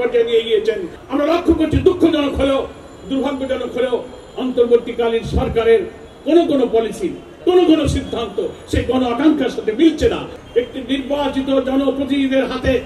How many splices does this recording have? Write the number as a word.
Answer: two